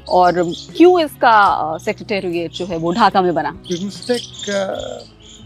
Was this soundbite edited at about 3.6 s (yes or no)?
yes